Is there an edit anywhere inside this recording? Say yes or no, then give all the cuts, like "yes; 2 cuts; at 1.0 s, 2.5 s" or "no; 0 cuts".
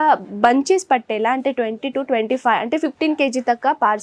no; 0 cuts